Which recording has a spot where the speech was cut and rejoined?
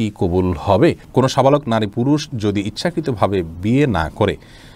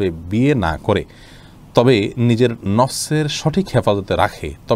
first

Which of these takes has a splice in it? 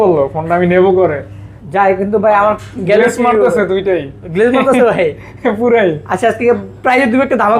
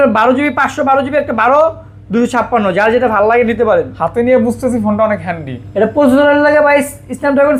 first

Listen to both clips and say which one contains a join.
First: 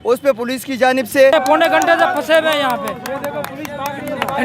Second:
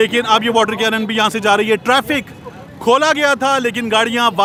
first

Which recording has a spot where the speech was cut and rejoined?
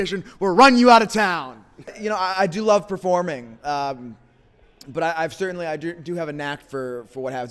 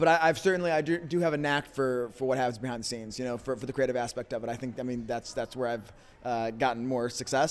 first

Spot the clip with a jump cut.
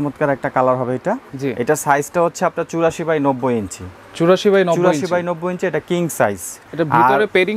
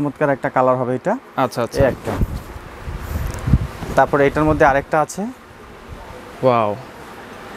first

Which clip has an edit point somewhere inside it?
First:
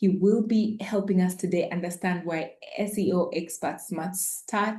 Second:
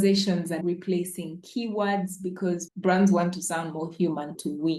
second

